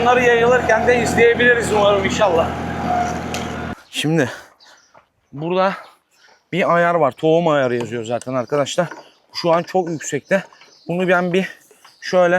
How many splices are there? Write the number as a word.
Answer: one